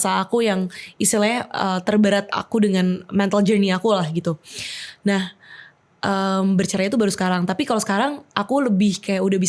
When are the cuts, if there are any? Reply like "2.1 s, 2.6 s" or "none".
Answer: none